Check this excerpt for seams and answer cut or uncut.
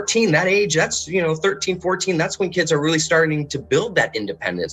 uncut